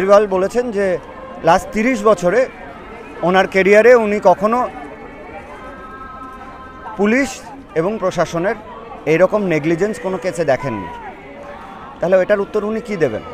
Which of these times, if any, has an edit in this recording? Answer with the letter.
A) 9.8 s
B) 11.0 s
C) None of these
C